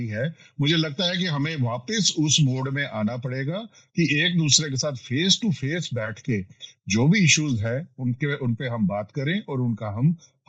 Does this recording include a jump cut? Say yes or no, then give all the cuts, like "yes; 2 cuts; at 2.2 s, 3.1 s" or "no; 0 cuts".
no; 0 cuts